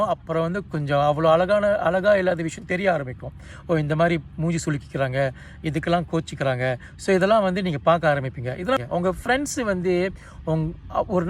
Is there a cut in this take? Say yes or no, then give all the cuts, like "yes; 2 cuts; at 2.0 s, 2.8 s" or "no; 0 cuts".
yes; 1 cut; at 8.8 s